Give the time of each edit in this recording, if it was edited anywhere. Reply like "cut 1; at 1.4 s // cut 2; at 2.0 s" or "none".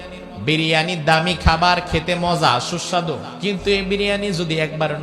cut 1; at 3.3 s